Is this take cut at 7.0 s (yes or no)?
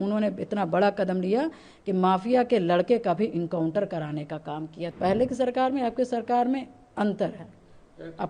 no